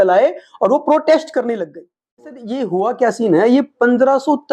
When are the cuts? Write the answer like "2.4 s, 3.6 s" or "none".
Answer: 2.5 s